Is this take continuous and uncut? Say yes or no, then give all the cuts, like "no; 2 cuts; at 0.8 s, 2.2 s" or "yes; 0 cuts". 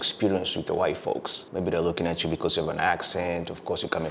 no; 1 cut; at 1.4 s